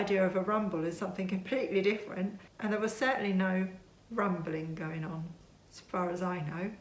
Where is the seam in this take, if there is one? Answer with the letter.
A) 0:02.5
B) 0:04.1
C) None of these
A